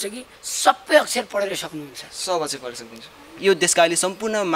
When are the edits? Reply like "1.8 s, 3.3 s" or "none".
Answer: 3.4 s